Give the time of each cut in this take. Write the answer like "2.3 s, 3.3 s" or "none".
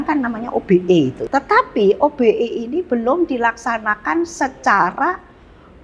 1.2 s